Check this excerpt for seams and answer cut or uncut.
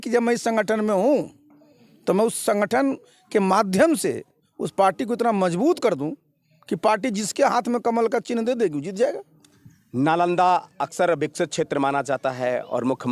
uncut